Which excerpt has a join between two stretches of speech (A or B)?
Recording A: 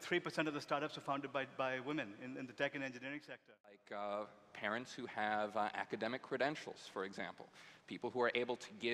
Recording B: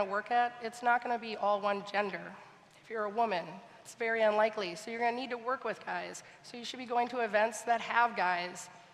A